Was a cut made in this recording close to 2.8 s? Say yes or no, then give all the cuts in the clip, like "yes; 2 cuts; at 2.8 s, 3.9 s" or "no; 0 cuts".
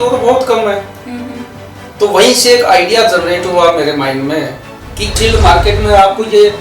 no; 1 cut; at 5.1 s